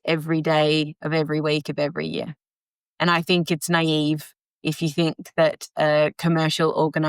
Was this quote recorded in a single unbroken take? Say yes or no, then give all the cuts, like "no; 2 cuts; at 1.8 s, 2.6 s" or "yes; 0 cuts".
yes; 0 cuts